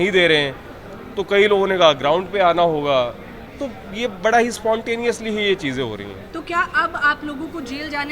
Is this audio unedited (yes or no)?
yes